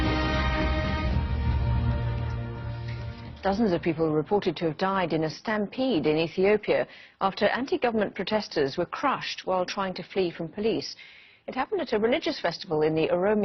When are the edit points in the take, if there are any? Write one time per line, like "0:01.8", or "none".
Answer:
none